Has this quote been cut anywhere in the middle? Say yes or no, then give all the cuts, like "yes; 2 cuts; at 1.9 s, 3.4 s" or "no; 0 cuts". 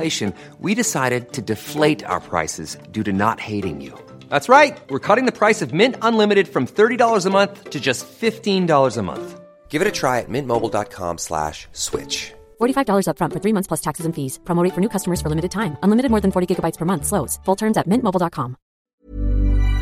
yes; 1 cut; at 18.8 s